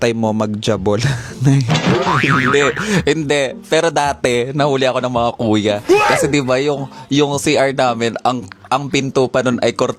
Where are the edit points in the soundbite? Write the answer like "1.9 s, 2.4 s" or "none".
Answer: none